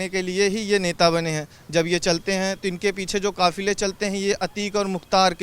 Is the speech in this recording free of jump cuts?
yes; 0 cuts

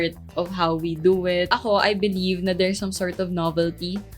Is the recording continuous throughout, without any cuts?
no; 1 cut; at 1.5 s

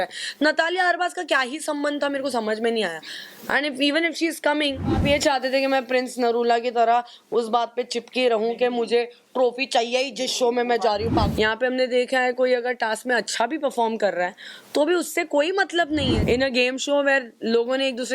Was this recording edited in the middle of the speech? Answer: yes; 3 cuts; at 5.0 s, 11.3 s, 16.2 s

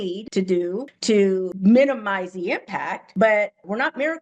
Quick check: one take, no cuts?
yes; 0 cuts

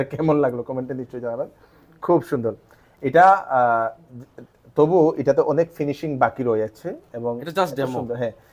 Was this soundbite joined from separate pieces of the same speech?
no; 0 cuts

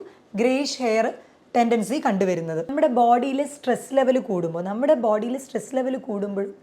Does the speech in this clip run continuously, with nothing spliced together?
no; 1 cut; at 2.7 s

